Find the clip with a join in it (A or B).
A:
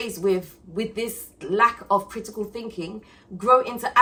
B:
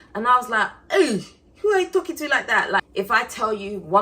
B